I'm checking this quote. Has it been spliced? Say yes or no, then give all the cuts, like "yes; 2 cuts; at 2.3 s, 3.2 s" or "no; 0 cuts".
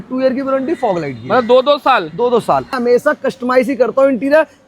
yes; 1 cut; at 2.8 s